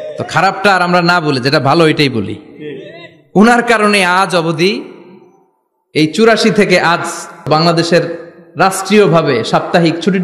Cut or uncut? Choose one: cut